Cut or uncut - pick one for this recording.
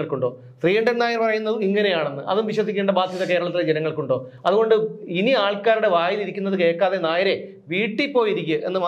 uncut